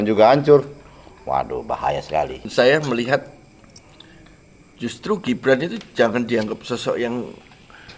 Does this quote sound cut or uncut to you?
cut